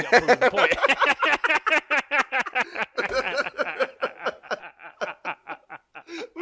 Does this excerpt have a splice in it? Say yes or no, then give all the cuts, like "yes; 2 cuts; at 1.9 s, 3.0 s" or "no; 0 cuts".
no; 0 cuts